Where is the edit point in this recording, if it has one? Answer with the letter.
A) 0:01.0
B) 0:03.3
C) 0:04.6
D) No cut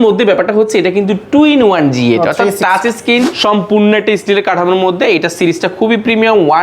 B